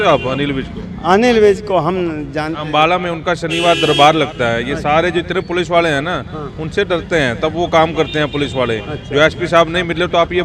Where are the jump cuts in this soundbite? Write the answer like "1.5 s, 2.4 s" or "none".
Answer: none